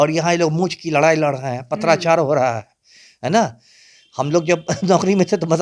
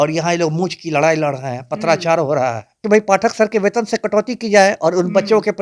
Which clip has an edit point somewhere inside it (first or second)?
second